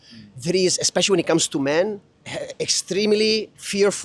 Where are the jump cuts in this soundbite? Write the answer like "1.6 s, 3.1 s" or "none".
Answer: 2.1 s